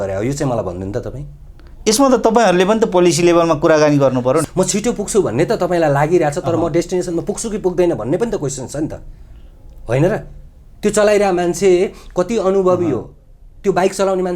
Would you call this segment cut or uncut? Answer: cut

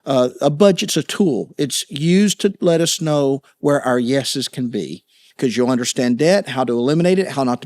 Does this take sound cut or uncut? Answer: cut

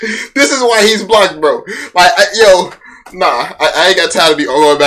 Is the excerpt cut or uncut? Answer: uncut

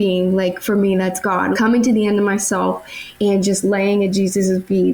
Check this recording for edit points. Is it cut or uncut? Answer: cut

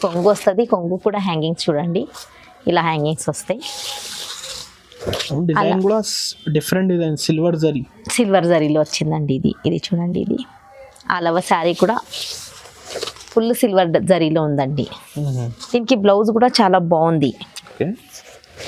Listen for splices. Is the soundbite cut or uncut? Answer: uncut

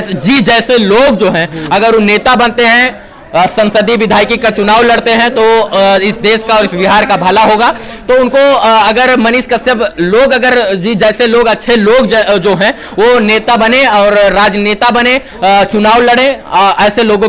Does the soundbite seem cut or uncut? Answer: uncut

